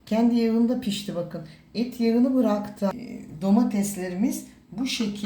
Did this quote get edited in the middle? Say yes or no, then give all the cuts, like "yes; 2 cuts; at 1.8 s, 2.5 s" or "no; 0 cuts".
yes; 1 cut; at 2.9 s